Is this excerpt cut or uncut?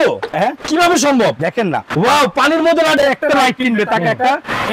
cut